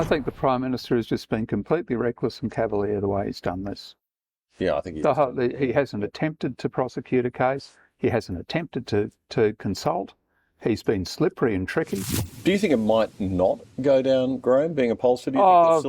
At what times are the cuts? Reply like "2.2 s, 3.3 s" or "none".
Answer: 12.2 s